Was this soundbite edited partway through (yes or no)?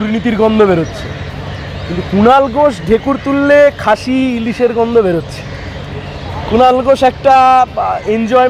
no